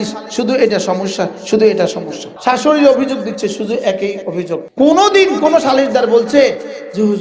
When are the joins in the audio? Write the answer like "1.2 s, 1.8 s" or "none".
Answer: 2.3 s, 4.7 s